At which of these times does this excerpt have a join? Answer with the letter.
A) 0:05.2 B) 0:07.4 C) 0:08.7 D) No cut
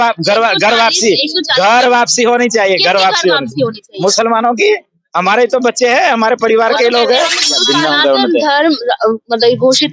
B